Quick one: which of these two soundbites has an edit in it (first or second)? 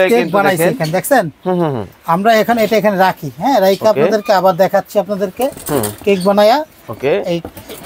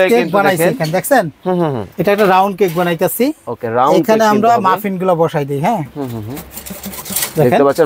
second